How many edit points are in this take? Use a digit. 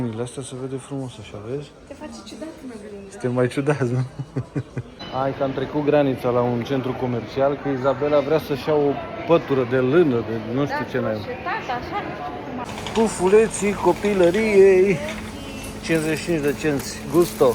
2